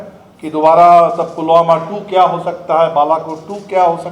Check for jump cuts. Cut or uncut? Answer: uncut